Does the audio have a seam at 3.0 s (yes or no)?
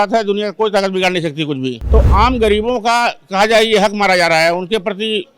no